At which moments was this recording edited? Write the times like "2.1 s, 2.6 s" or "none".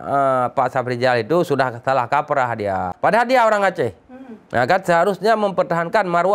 2.9 s